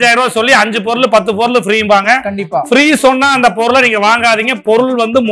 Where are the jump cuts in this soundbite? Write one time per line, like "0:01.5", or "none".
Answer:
none